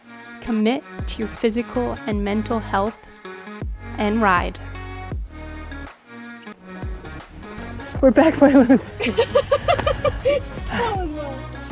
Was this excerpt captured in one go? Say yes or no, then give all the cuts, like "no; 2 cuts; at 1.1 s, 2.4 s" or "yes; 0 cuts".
no; 1 cut; at 6.5 s